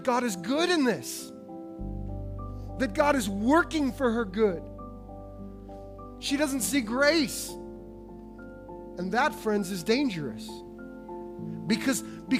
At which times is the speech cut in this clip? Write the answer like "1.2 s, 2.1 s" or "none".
none